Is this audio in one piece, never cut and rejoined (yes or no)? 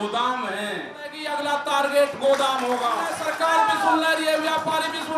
no